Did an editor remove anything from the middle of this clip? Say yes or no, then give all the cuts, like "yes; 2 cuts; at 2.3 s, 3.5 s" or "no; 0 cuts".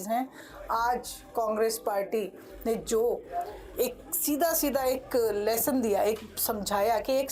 no; 0 cuts